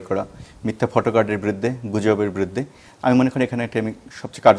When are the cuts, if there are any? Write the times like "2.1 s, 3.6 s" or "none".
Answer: none